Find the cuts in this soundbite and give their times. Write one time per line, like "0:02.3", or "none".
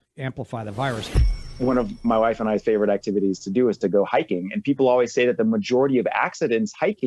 0:01.4